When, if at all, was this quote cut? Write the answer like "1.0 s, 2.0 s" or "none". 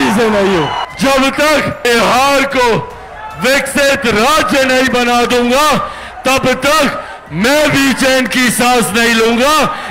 0.8 s, 1.9 s